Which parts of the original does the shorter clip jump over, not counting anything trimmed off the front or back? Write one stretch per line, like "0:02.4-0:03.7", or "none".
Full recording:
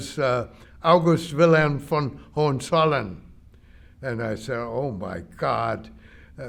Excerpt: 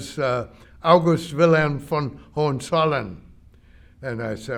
none